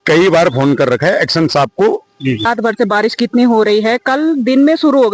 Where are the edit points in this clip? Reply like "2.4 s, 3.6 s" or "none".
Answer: 2.4 s